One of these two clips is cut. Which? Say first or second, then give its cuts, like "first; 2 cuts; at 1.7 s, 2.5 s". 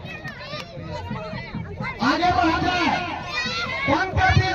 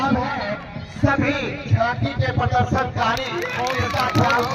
first; 1 cut; at 0.9 s